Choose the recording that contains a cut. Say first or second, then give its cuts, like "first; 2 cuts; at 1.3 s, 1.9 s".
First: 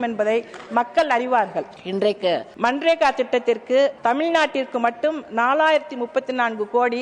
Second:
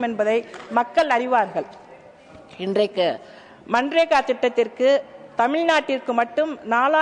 first; 3 cuts; at 1.8 s, 2.5 s, 4.0 s